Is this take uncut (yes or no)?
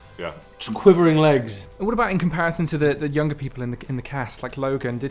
no